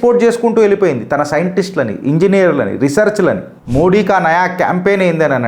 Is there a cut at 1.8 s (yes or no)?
no